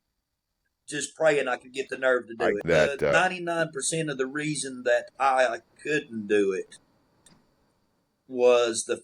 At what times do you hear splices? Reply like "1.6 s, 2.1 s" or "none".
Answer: 2.6 s